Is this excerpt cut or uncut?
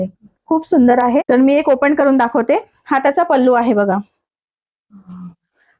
cut